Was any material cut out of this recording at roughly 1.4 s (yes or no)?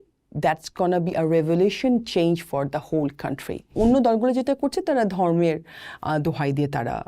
no